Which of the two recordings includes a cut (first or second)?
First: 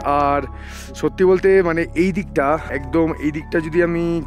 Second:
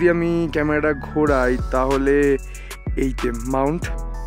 first